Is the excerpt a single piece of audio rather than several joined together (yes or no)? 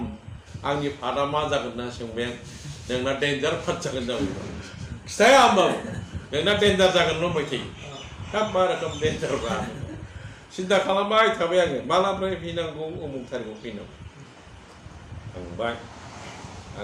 yes